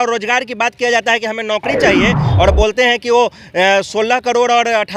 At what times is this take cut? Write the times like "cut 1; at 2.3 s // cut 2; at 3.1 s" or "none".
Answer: cut 1; at 2.3 s